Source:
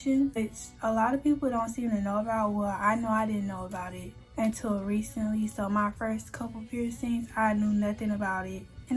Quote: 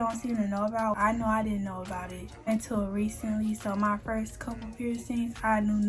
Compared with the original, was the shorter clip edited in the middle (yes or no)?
yes